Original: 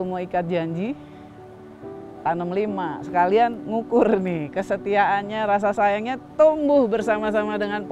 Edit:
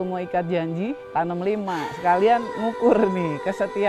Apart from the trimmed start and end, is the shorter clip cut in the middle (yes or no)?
yes